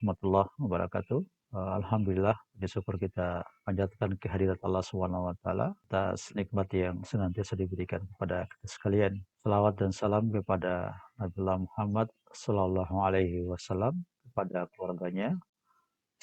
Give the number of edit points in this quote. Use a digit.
3